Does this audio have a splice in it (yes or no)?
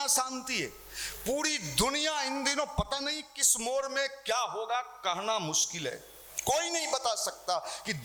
no